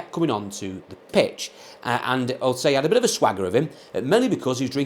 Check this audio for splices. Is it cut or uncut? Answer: uncut